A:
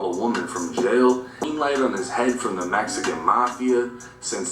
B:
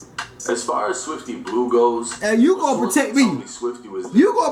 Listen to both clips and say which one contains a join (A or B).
A